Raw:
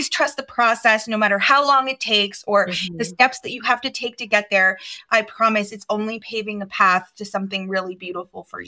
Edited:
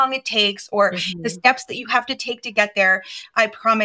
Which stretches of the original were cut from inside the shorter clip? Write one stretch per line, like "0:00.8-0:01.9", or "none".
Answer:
none